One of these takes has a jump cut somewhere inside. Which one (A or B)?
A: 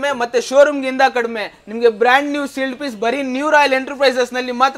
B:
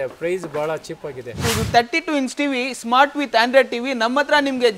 B